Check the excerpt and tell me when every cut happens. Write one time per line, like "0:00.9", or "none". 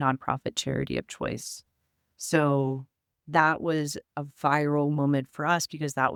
none